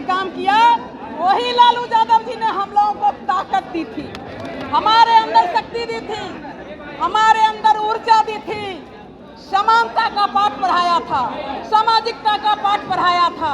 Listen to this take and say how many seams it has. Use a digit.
0